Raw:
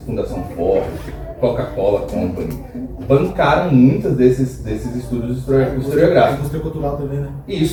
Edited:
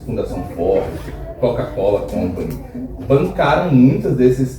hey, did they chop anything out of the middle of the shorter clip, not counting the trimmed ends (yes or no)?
no